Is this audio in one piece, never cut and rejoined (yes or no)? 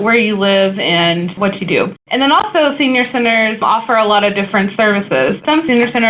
no